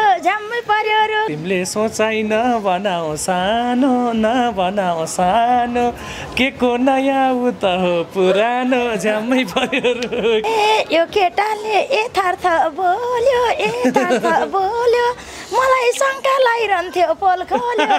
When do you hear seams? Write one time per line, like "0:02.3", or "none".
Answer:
0:01.4
0:10.4